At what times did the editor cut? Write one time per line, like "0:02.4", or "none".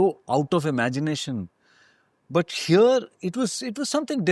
none